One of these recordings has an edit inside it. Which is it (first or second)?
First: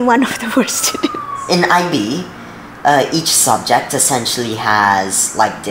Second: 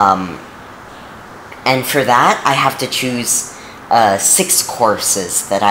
first